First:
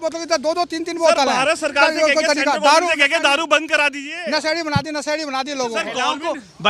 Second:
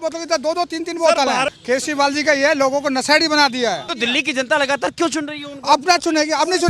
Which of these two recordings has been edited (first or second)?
second